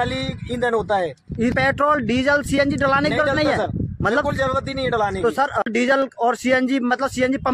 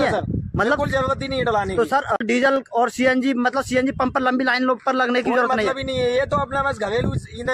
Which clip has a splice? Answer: first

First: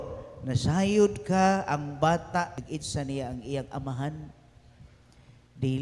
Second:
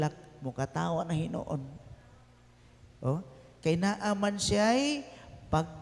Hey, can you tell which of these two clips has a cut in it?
first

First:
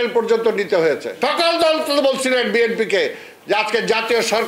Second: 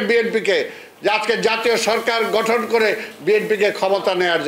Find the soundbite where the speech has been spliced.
first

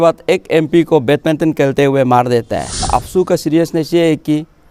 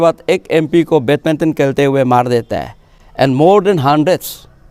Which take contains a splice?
first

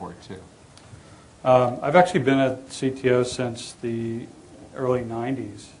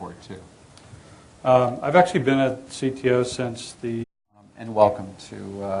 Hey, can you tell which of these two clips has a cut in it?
first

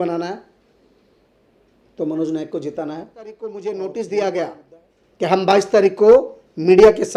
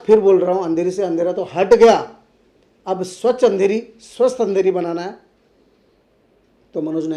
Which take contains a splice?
first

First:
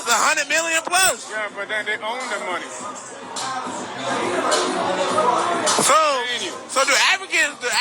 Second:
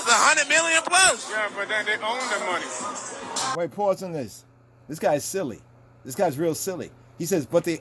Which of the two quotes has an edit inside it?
first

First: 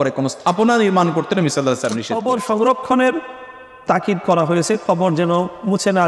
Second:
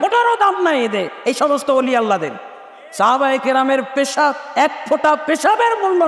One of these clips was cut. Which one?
first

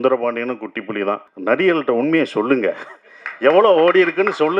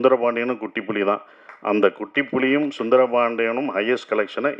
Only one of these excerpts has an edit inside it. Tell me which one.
first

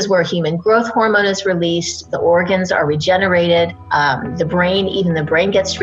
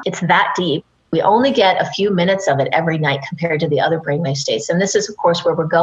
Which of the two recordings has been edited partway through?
second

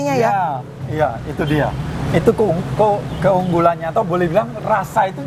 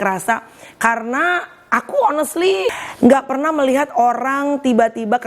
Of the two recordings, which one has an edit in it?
second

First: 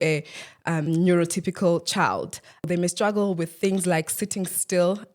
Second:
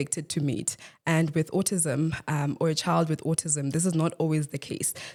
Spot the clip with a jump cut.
first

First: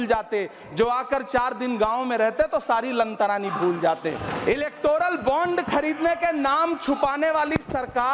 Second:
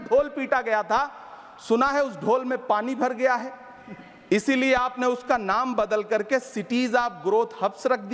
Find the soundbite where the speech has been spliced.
first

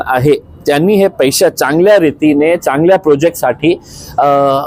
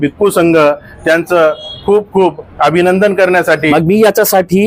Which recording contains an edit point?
second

